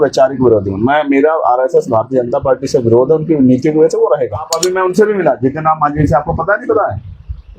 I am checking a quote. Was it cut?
yes; 1 cut; at 4.5 s

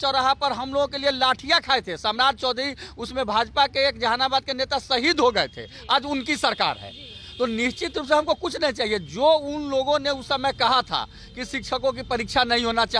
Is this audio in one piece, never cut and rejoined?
yes; 0 cuts

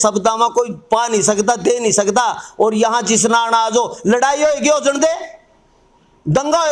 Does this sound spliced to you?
no; 0 cuts

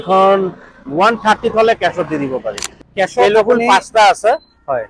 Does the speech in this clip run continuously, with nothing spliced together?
yes; 0 cuts

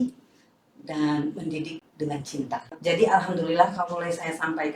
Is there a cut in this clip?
yes; 1 cut; at 2.7 s

